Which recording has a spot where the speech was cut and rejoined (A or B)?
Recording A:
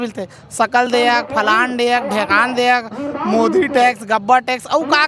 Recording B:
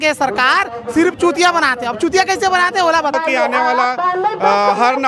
B